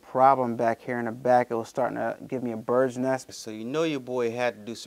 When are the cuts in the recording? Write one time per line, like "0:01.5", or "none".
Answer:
0:03.3